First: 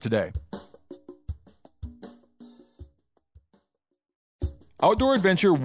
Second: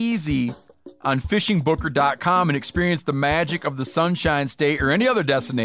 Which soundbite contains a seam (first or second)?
first